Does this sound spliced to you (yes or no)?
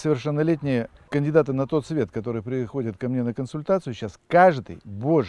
yes